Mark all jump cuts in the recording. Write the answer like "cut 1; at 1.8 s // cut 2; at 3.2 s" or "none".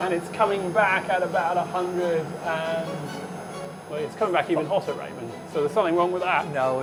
none